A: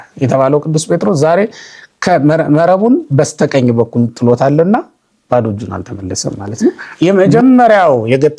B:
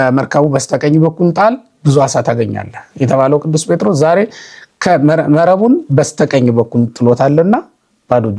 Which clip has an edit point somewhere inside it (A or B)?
A